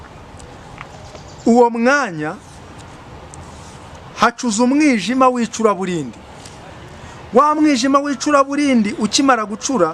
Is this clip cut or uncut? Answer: uncut